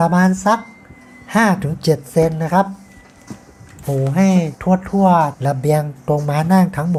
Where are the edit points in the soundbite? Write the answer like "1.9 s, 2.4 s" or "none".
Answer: none